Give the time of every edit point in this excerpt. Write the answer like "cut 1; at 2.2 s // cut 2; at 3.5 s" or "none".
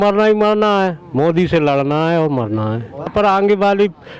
cut 1; at 3.1 s